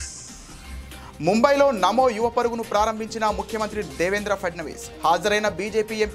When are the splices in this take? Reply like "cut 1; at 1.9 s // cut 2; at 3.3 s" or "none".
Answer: cut 1; at 1.0 s